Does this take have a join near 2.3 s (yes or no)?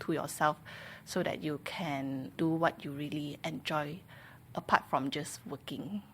yes